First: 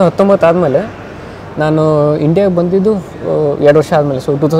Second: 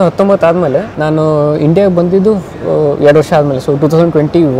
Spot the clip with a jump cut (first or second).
second